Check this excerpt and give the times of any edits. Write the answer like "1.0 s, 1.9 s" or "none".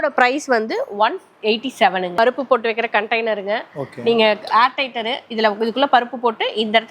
2.2 s